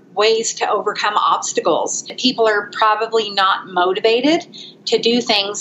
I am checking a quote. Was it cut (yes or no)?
yes